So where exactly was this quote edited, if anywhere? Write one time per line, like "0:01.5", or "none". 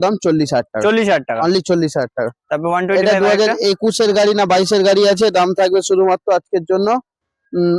none